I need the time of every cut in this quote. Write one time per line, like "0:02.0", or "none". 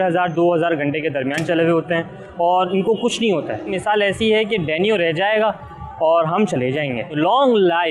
0:03.8
0:07.1